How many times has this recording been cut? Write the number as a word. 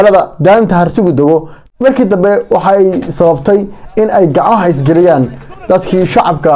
one